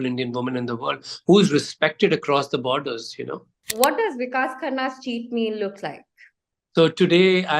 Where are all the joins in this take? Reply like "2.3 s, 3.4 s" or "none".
3.7 s